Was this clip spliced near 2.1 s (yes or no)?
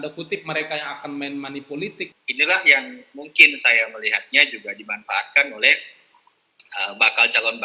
yes